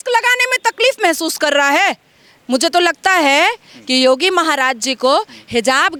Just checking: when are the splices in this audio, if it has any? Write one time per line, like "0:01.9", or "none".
none